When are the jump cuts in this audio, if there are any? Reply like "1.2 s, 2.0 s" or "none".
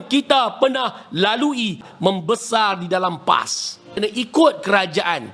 1.9 s, 3.9 s